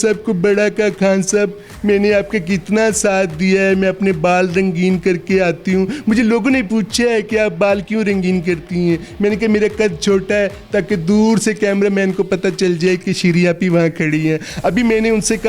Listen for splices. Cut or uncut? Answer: uncut